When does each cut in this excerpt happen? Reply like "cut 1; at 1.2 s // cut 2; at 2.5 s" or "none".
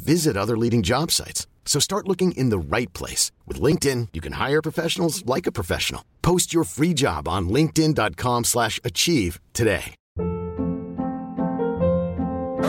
cut 1; at 10.0 s